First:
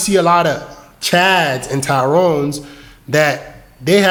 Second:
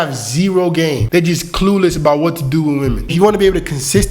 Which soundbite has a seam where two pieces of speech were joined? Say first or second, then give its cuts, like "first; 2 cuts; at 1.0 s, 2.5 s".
second; 2 cuts; at 1.0 s, 3.1 s